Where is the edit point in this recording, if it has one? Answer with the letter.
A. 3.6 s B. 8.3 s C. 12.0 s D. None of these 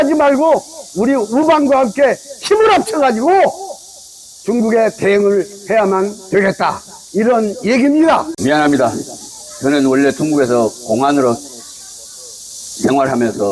B